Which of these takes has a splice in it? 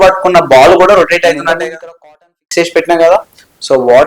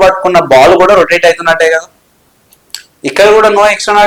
first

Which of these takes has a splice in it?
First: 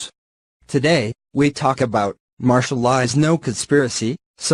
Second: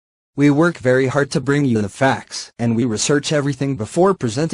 first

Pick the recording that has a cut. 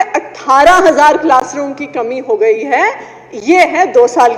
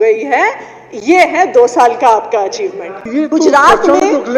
second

